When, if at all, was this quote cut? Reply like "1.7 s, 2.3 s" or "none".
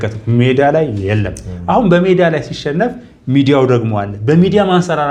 none